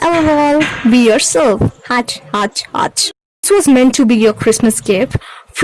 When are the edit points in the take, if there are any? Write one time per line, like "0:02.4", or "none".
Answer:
0:03.5